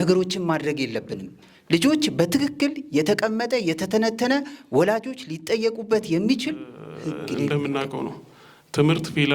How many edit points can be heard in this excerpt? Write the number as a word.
one